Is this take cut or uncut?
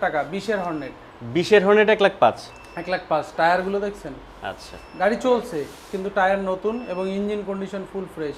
uncut